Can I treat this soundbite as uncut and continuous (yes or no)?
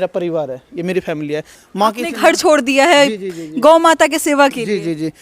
no